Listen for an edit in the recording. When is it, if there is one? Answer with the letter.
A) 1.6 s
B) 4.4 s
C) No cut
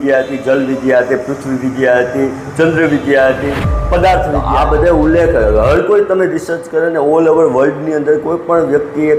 B